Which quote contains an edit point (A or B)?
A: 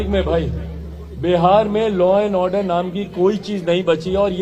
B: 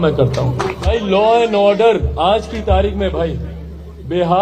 B